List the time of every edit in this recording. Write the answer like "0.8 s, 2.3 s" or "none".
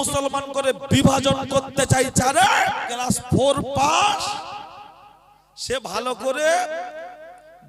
2.9 s